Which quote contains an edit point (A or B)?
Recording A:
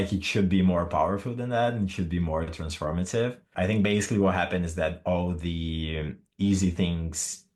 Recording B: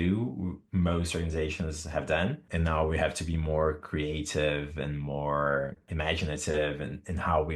B